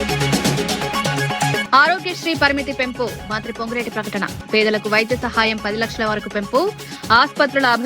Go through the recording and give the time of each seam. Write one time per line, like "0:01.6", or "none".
0:01.6